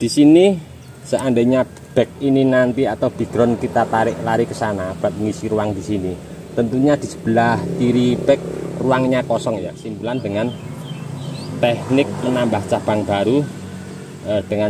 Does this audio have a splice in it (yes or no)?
yes